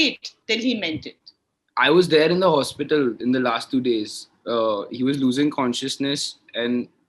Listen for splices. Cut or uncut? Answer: cut